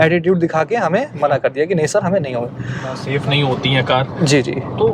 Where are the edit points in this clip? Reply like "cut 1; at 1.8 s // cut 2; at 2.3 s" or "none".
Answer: cut 1; at 3.0 s